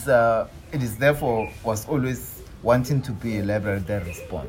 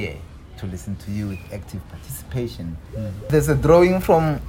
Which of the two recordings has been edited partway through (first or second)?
second